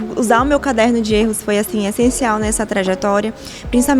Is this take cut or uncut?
uncut